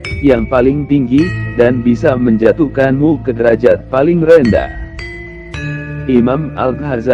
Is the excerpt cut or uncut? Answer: cut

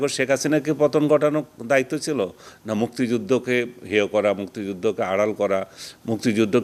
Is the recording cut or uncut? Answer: uncut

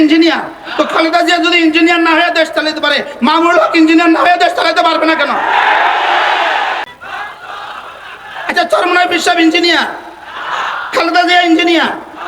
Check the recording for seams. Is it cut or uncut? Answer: cut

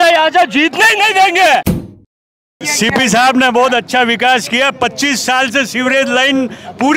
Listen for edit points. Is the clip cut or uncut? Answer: cut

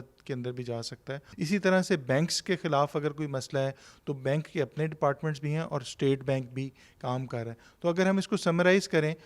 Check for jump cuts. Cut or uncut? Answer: cut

